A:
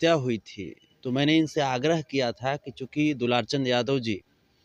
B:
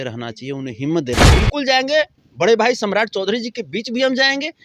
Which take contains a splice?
B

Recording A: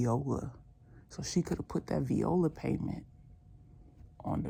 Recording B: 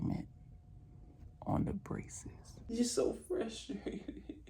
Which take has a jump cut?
B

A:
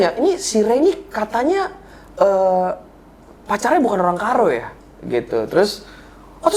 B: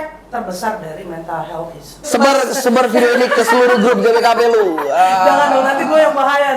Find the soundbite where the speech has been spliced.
B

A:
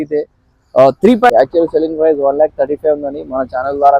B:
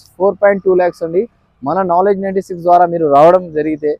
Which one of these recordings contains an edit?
A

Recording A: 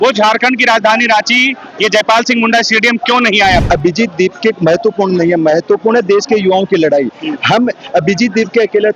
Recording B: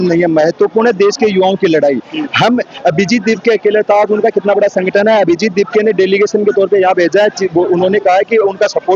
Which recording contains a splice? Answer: A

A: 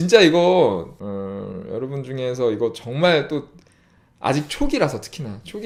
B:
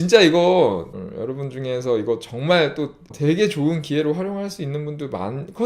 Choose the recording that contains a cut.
B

